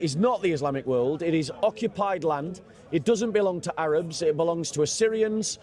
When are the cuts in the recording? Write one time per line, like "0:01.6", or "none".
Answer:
none